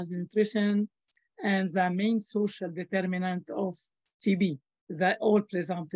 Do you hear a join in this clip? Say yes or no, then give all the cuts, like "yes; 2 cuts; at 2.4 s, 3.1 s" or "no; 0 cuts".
yes; 1 cut; at 4.7 s